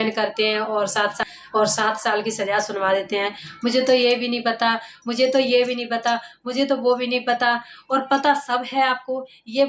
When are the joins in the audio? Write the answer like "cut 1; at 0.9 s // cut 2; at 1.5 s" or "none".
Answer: cut 1; at 1.2 s

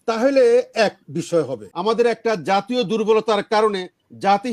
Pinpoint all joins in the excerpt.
cut 1; at 1.6 s

